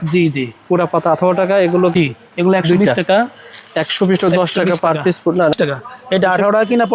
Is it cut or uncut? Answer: cut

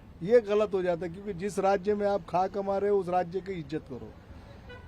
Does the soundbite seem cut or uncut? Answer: uncut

